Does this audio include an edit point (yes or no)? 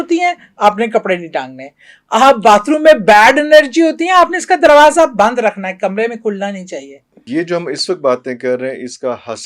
yes